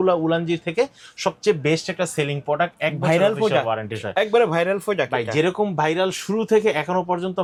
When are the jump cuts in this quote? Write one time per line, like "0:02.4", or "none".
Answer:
none